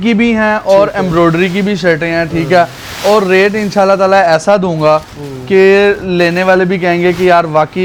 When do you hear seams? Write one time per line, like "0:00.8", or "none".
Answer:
none